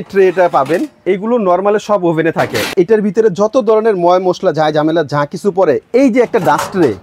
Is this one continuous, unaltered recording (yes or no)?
no